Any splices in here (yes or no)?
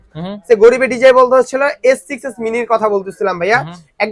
no